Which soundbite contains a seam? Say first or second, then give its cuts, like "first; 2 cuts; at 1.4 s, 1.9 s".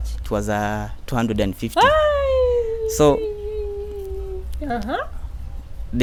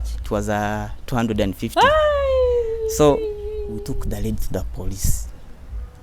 second; 1 cut; at 3.9 s